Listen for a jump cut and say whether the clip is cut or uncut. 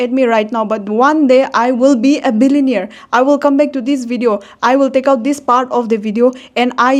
uncut